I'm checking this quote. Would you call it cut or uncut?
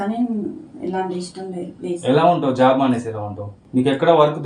uncut